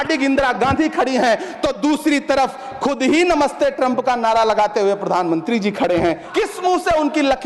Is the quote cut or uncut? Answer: cut